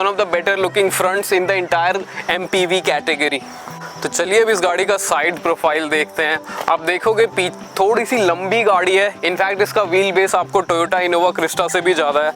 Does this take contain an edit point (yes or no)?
no